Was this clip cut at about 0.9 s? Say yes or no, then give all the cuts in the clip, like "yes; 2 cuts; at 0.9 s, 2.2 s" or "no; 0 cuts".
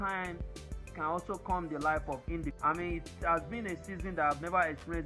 no; 1 cut; at 2.5 s